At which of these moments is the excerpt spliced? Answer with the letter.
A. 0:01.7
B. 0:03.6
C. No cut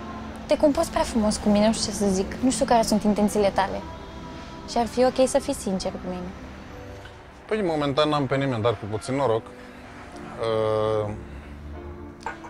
C